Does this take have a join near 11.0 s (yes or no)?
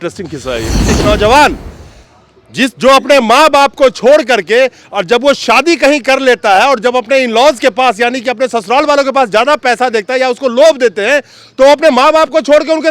no